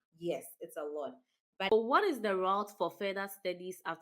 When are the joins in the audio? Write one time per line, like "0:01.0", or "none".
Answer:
0:01.7